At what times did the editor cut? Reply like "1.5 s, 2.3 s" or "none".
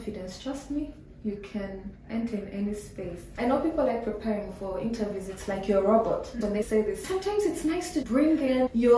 3.2 s, 6.7 s